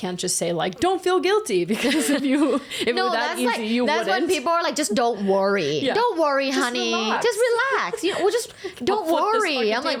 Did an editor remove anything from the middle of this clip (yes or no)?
no